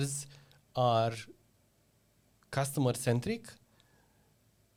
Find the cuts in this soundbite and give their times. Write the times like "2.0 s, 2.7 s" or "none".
none